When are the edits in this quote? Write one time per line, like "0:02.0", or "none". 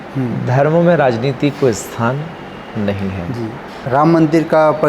0:03.9